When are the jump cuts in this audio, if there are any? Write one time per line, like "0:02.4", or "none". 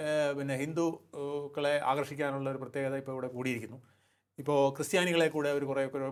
none